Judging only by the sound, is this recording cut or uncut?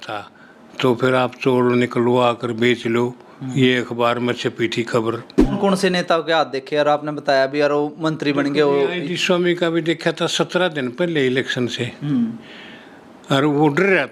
cut